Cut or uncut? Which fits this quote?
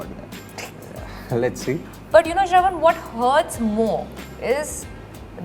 cut